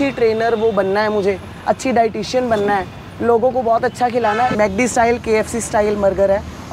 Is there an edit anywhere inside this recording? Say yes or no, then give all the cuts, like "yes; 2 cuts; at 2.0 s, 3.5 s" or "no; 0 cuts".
yes; 1 cut; at 4.5 s